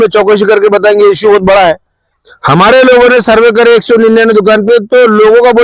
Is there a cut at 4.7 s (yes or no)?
no